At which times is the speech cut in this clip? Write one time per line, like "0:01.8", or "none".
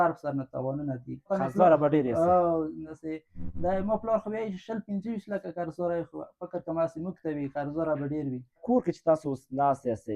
0:01.3
0:02.9
0:08.6